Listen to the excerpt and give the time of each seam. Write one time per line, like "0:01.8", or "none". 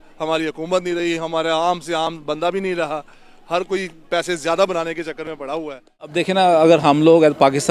0:06.1